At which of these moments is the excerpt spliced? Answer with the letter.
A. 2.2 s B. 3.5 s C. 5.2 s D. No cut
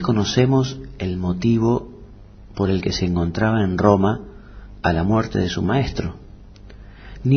D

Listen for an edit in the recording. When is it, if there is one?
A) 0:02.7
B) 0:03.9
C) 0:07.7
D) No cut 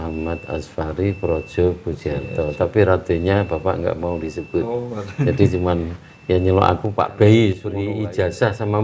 C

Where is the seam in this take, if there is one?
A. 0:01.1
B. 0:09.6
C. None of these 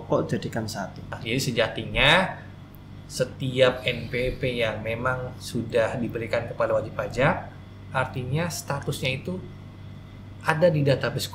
A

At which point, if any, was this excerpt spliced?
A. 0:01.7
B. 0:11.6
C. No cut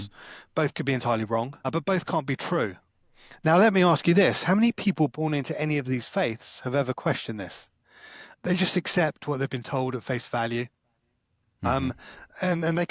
A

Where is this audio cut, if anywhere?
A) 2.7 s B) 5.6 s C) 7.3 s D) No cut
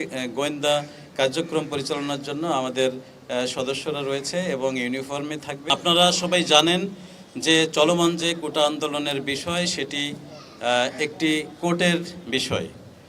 B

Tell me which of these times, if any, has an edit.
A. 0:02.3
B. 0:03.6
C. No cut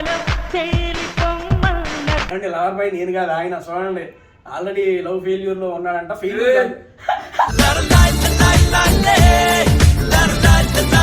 A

